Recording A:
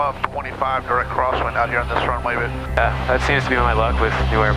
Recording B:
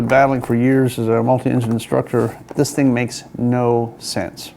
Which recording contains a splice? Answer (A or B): B